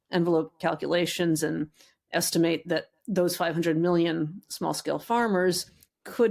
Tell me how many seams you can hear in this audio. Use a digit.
0